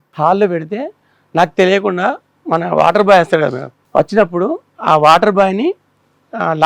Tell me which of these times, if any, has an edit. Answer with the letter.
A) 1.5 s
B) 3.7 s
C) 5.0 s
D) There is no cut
B